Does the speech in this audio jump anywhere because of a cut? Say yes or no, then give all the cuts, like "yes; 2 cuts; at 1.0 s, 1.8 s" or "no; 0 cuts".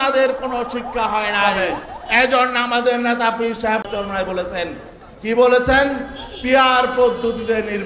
yes; 1 cut; at 1.4 s